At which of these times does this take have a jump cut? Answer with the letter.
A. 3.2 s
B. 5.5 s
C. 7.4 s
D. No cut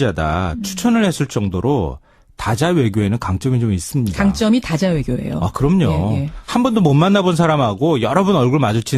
B